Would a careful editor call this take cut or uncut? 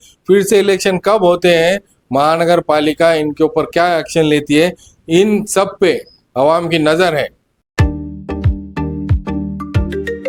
uncut